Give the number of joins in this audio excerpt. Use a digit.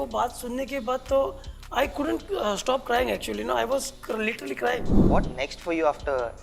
1